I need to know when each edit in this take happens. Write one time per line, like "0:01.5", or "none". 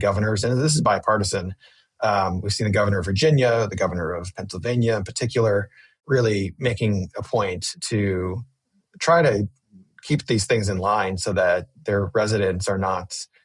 0:05.9